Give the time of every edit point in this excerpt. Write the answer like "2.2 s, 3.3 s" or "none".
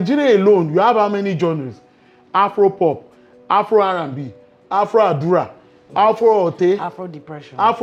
none